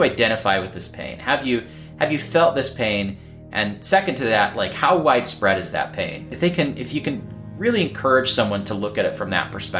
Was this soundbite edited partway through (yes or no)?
no